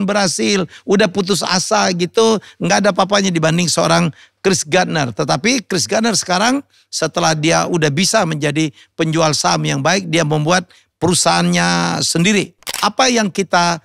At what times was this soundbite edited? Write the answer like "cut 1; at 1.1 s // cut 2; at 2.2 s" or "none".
cut 1; at 12.6 s